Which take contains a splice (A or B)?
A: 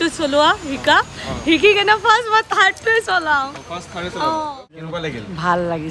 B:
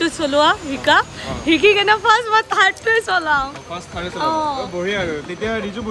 A